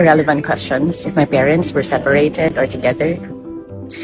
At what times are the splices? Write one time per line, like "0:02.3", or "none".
0:01.0